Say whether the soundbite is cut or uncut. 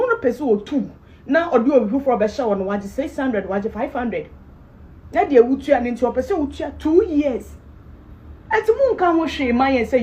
uncut